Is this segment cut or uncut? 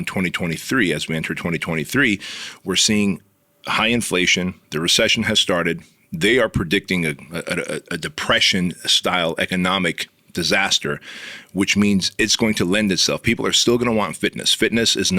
uncut